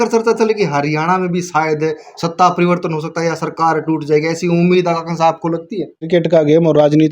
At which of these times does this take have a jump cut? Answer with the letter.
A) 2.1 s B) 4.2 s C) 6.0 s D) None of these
C